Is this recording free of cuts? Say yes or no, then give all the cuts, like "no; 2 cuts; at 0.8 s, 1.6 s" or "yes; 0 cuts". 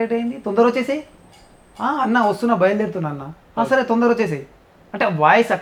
yes; 0 cuts